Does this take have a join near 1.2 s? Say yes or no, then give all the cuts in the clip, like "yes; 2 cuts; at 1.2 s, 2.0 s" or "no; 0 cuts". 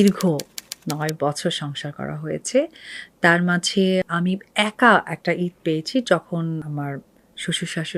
no; 2 cuts; at 4.1 s, 6.6 s